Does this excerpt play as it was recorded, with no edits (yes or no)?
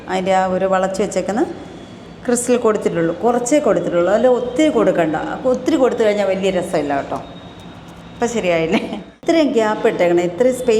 no